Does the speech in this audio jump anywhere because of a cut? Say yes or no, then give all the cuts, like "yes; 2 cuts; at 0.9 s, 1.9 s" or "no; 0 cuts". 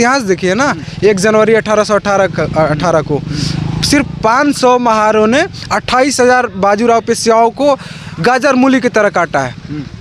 no; 0 cuts